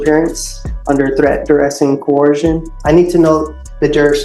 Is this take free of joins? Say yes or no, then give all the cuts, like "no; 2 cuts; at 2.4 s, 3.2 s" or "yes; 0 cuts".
no; 1 cut; at 2.7 s